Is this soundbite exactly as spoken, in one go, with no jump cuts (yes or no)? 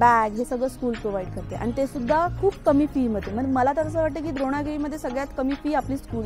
yes